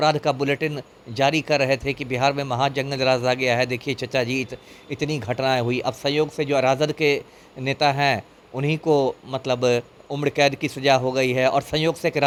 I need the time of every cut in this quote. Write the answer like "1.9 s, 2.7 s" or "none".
none